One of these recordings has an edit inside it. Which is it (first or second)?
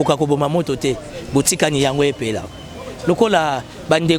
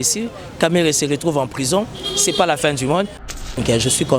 second